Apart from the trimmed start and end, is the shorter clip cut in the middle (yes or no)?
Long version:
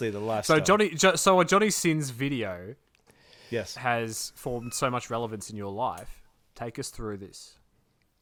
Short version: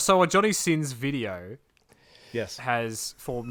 no